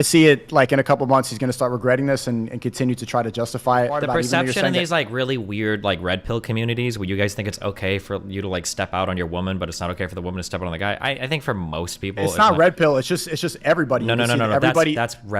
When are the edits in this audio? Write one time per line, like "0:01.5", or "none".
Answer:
0:04.0